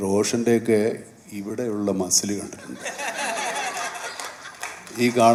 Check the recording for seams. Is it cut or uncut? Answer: uncut